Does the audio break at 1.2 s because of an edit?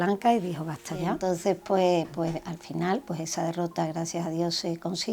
yes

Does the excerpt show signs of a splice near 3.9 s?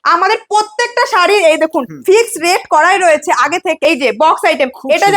yes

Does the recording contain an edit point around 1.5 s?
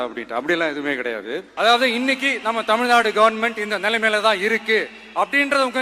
yes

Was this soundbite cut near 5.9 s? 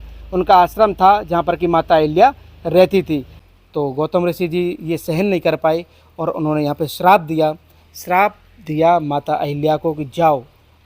no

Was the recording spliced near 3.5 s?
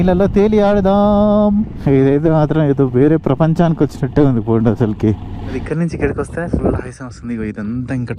no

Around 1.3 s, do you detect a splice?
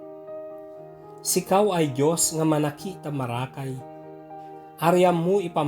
yes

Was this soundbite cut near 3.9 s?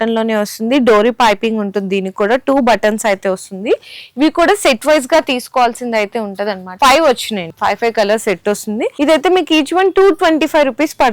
no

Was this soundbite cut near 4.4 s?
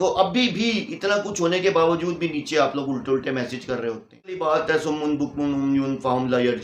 yes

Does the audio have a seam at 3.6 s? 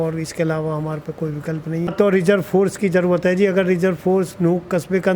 no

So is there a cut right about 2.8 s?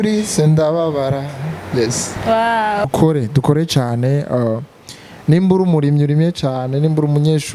yes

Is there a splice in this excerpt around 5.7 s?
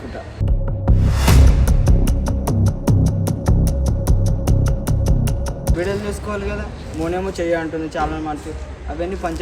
yes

